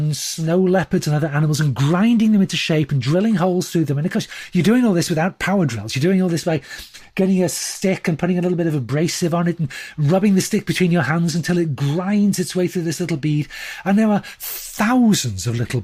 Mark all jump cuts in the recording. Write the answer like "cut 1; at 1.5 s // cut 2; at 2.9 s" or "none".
none